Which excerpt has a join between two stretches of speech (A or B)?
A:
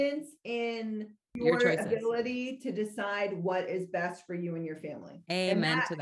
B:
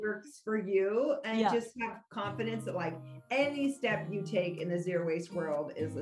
A